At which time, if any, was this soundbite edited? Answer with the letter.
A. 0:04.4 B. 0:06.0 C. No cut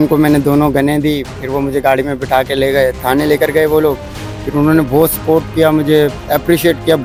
C